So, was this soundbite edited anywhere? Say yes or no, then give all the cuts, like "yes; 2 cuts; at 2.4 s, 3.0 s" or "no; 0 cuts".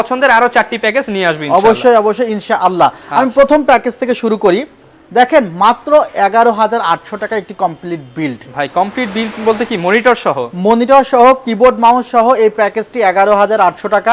no; 0 cuts